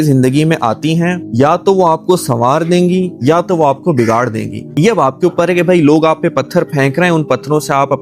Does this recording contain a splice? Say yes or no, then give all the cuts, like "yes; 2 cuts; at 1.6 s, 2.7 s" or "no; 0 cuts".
yes; 2 cuts; at 1.2 s, 4.7 s